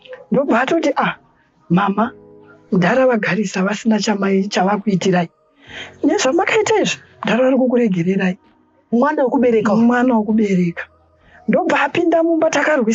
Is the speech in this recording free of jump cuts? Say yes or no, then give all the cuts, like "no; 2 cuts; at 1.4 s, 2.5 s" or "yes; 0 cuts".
yes; 0 cuts